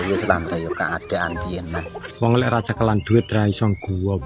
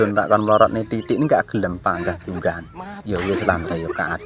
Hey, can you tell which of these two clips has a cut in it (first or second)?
first